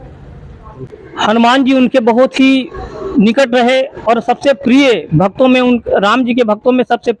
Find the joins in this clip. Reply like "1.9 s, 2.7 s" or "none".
0.9 s